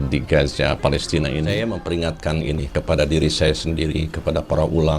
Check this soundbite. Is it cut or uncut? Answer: cut